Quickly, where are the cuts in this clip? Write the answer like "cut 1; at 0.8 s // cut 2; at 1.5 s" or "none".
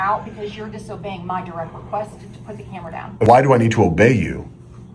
cut 1; at 3.2 s